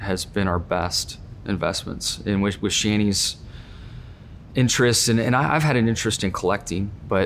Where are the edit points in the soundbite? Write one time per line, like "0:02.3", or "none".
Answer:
none